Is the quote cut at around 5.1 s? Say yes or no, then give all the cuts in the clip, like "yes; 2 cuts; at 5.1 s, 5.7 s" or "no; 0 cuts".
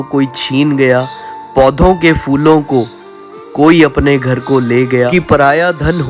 yes; 1 cut; at 5.1 s